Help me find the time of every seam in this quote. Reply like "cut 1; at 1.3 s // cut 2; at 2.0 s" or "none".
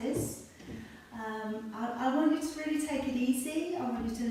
none

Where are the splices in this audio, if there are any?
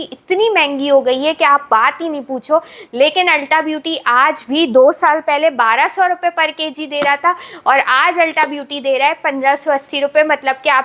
none

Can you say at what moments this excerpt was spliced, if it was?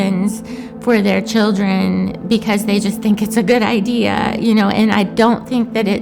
cut 1; at 4.3 s

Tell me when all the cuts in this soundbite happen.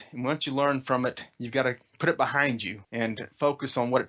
cut 1; at 2.0 s // cut 2; at 2.8 s

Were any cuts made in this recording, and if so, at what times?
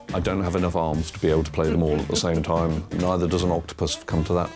cut 1; at 2.9 s

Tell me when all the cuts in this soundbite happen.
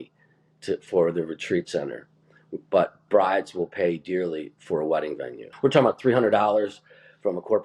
cut 1; at 5.5 s

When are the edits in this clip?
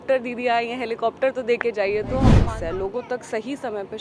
cut 1; at 2.4 s

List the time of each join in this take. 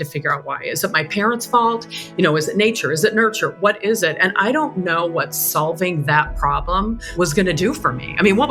none

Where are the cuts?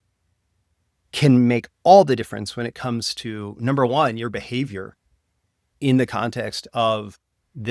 none

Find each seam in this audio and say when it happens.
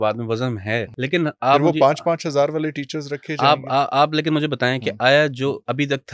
cut 1; at 0.9 s

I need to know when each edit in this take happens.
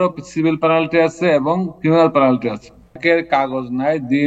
cut 1; at 3.0 s

